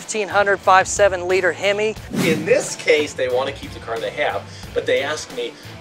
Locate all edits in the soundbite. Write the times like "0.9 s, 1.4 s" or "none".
2.1 s